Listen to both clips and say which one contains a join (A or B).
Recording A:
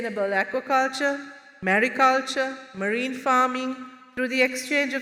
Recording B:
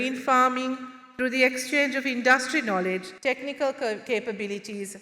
B